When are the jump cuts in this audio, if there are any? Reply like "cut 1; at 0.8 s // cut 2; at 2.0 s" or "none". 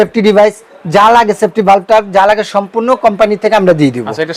none